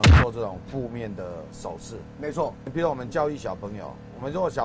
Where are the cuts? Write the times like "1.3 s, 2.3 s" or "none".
2.6 s